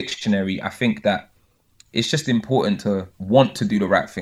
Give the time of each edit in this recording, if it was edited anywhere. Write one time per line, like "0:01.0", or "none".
0:03.1